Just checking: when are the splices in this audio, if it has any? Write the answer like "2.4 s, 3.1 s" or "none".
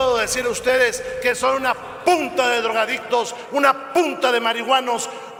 none